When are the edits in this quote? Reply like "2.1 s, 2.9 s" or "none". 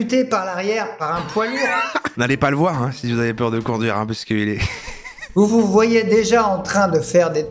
1.9 s, 5.2 s